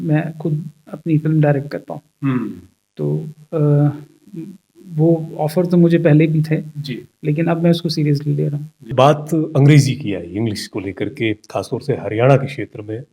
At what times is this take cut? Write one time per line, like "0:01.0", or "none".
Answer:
0:08.9